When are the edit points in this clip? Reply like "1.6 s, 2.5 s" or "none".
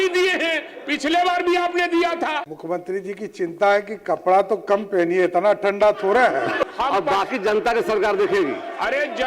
2.4 s, 6.6 s